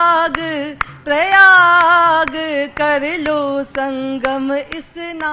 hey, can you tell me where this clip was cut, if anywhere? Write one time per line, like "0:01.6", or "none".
none